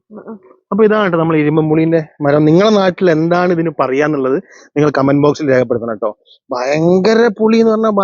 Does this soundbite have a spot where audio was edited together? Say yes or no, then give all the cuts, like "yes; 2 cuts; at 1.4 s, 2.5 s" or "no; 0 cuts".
no; 0 cuts